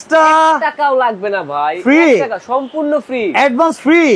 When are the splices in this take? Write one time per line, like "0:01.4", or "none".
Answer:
none